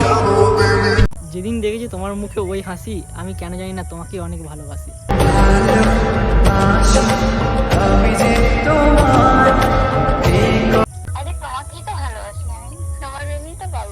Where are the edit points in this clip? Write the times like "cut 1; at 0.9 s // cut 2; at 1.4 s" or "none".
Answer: cut 1; at 1.2 s // cut 2; at 11.0 s

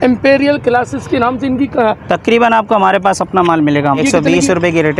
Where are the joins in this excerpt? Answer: cut 1; at 4.0 s

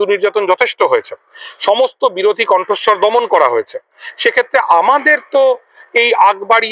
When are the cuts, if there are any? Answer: none

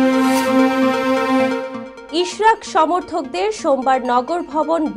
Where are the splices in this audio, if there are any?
cut 1; at 1.8 s

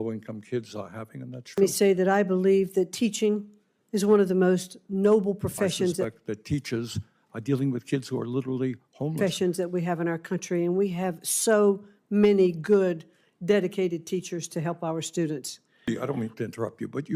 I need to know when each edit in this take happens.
cut 1; at 1.6 s // cut 2; at 6.1 s // cut 3; at 9.2 s // cut 4; at 15.9 s

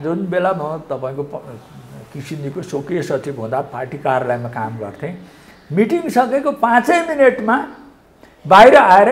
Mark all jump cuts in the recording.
none

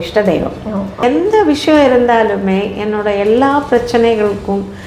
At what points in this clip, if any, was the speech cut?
cut 1; at 1.0 s

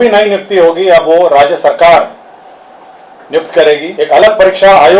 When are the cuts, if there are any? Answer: cut 1; at 3.9 s

